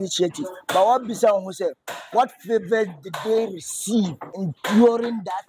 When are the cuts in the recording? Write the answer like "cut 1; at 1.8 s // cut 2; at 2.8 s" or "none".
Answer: cut 1; at 4.3 s